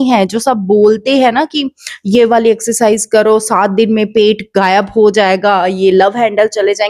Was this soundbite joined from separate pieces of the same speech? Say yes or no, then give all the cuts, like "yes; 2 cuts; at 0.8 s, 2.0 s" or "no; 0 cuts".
no; 0 cuts